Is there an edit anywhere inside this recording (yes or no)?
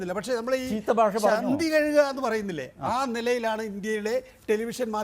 yes